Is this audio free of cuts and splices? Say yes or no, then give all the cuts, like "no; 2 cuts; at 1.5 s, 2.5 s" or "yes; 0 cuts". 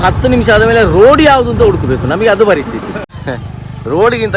no; 1 cut; at 3.1 s